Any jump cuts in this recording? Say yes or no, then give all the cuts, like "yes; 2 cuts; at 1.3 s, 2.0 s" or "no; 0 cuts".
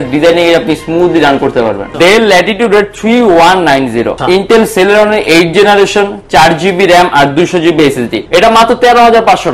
yes; 3 cuts; at 1.9 s, 4.2 s, 8.3 s